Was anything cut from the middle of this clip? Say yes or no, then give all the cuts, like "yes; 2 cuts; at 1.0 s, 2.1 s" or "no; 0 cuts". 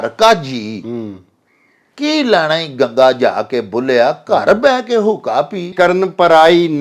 yes; 1 cut; at 5.7 s